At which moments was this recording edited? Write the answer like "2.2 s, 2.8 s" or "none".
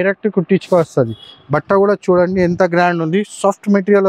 none